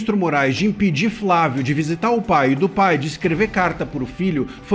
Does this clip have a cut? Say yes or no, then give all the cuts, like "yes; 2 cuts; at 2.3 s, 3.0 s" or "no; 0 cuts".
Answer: no; 0 cuts